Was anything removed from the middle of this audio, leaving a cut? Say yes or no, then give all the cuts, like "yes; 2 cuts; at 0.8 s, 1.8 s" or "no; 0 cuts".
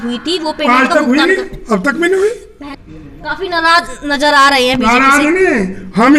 yes; 1 cut; at 2.7 s